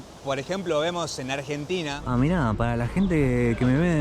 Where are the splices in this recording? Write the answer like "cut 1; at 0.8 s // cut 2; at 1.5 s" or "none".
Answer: cut 1; at 2.0 s

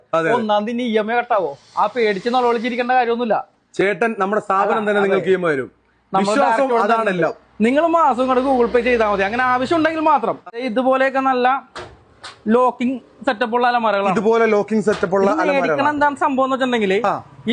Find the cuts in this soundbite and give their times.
cut 1; at 10.6 s

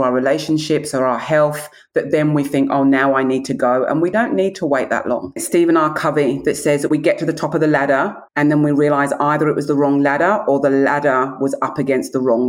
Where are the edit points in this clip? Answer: cut 1; at 4.1 s // cut 2; at 5.4 s // cut 3; at 8.2 s

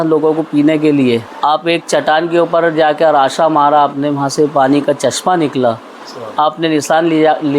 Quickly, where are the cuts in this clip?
cut 1; at 1.3 s

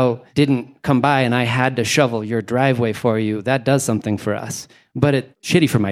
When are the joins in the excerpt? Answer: cut 1; at 5.0 s

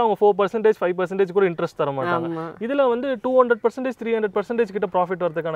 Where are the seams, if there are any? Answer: none

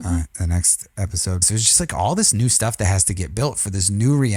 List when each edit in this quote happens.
cut 1; at 1.4 s

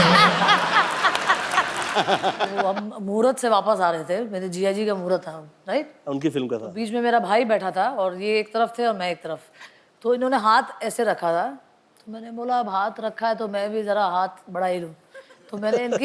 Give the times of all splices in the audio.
cut 1; at 1.9 s

